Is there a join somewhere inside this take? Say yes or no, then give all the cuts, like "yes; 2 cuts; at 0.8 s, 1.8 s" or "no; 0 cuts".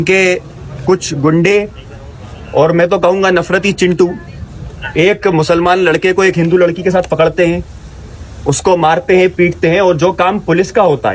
no; 0 cuts